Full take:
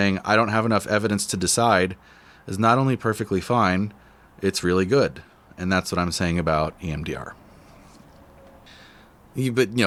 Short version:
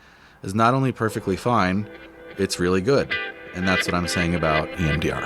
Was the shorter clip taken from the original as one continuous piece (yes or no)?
yes